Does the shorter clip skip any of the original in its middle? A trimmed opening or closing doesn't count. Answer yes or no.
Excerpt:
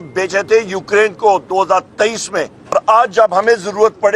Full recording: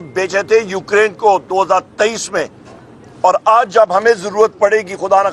yes